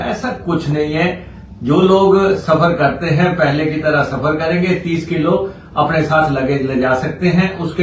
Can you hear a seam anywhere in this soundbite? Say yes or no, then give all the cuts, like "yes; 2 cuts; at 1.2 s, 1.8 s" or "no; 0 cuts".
no; 0 cuts